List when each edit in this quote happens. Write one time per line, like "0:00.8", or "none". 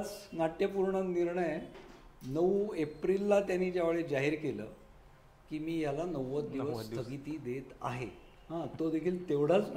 none